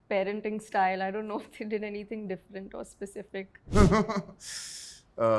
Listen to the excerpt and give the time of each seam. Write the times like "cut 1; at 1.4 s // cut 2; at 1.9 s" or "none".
cut 1; at 3.7 s